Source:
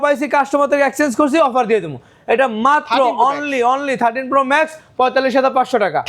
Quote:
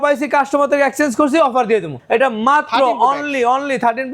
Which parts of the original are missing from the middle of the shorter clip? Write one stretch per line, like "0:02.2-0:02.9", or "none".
0:01.9-0:02.1

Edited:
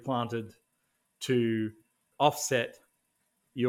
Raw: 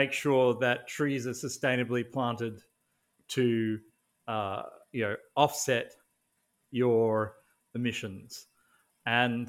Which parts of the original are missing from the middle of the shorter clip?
0:04.1-0:05.2

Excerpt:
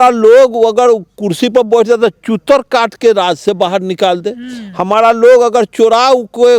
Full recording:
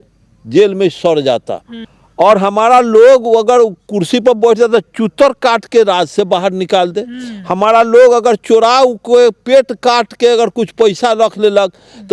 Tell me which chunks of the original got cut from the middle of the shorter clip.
none

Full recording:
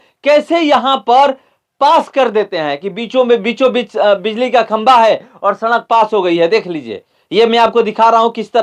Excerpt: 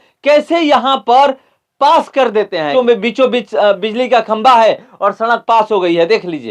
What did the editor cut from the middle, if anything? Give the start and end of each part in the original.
0:02.7-0:03.1

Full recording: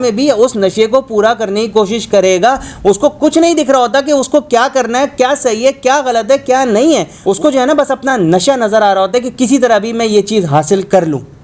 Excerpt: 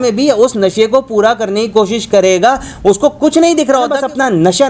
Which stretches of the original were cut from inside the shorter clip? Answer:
0:03.8-0:07.6

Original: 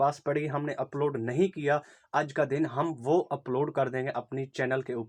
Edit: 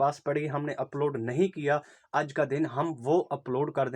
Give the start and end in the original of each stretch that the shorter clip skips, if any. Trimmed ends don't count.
none

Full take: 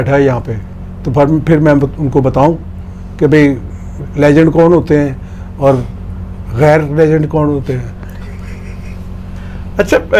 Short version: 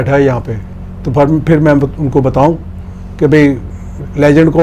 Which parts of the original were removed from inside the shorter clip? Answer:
none

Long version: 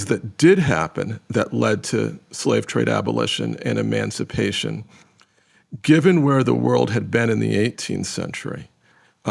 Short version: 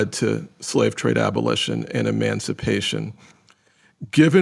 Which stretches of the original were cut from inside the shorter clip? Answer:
none

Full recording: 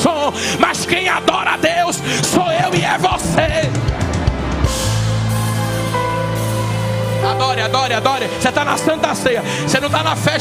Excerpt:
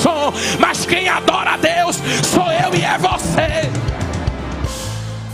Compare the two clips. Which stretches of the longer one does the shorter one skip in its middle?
none

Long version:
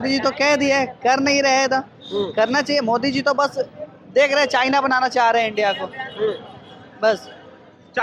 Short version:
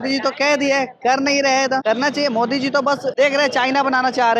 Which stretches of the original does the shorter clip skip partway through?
0:01.8-0:02.3
0:03.6-0:04.1

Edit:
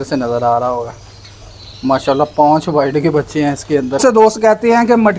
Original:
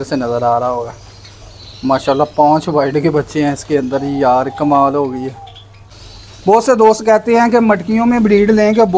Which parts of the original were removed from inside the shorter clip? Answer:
0:04.0-0:06.6

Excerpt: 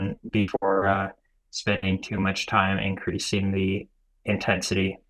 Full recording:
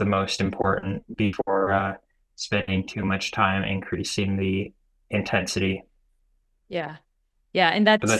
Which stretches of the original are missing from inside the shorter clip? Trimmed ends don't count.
none

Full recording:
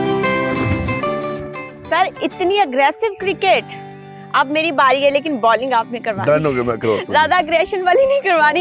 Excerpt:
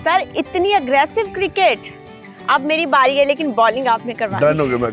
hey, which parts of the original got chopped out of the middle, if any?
none

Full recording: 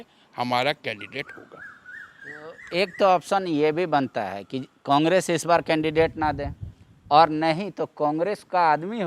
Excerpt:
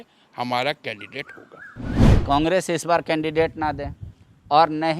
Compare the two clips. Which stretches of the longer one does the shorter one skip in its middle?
0:02.1-0:04.7

